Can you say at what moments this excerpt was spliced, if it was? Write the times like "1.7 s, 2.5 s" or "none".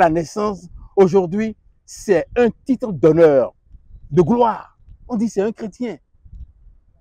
none